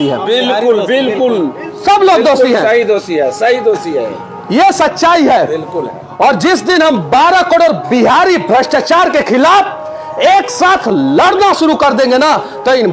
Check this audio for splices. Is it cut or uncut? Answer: uncut